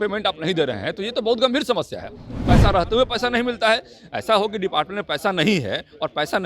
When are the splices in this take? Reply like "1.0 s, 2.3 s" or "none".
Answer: 2.3 s